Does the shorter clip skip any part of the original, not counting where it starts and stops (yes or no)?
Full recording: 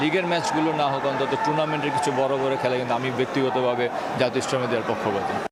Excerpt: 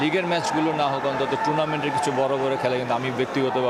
no